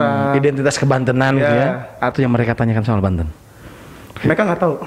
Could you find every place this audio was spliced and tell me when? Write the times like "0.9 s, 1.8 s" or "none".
2.1 s

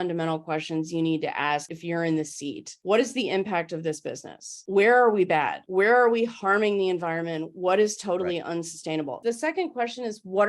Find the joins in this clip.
1.7 s, 2.7 s, 4.6 s, 5.6 s, 9.1 s

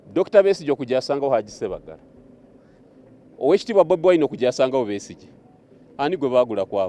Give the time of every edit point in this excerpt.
none

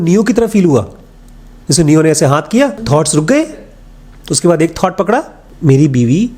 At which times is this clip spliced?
2.8 s, 5.4 s

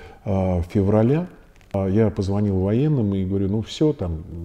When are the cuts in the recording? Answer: 1.7 s

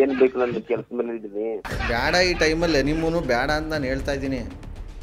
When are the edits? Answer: 1.7 s

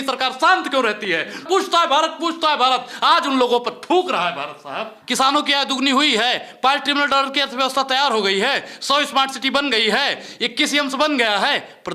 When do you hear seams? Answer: 1.4 s, 5.0 s

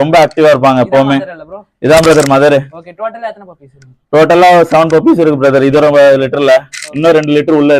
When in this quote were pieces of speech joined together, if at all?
none

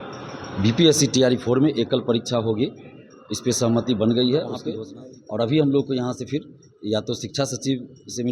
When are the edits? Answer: 4.6 s

